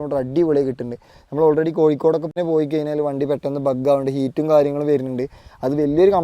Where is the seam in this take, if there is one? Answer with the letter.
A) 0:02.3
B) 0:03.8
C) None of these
A